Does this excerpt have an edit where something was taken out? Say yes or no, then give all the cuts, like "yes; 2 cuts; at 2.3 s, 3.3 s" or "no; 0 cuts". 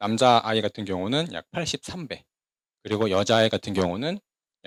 no; 0 cuts